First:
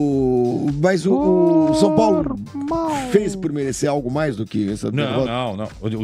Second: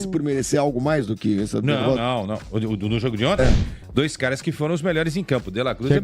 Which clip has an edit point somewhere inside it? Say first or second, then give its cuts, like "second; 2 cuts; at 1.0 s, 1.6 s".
second; 1 cut; at 3.7 s